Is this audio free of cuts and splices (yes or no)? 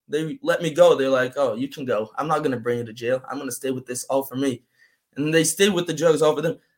yes